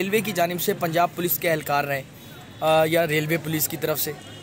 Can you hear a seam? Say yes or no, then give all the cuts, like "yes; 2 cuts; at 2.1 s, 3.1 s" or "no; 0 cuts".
no; 0 cuts